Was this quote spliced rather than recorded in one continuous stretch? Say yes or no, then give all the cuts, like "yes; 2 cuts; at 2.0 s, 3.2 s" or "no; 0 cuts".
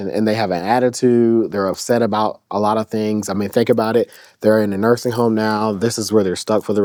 no; 0 cuts